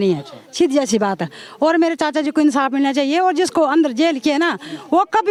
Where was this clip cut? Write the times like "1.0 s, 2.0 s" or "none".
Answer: none